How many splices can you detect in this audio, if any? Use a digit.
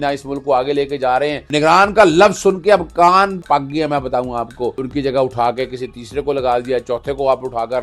3